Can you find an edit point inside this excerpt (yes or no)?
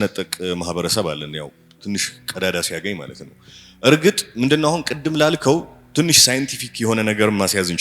yes